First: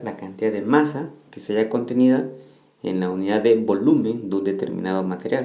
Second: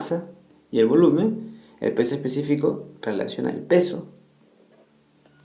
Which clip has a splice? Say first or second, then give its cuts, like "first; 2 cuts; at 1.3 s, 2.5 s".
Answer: first; 1 cut; at 3.1 s